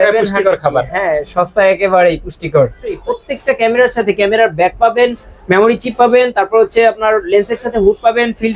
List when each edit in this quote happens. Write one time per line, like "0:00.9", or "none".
0:03.0